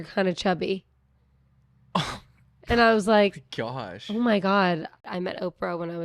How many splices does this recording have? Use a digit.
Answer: 1